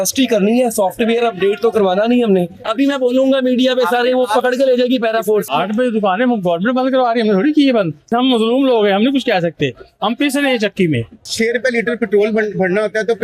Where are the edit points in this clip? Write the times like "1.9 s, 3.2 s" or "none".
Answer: 2.6 s, 5.5 s, 8.1 s, 11.2 s